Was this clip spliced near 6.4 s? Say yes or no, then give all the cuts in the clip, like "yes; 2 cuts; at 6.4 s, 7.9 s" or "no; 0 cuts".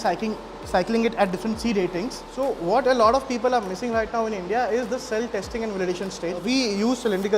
yes; 2 cuts; at 2.2 s, 6.4 s